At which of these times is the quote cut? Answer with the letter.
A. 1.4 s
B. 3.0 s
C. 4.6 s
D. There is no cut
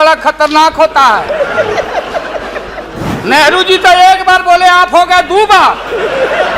B